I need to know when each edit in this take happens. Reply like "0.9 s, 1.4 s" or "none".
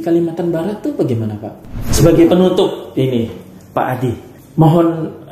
1.8 s, 4.3 s